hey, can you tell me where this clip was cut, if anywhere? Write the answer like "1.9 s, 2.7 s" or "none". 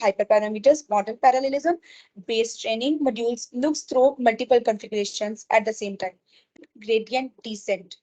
6.6 s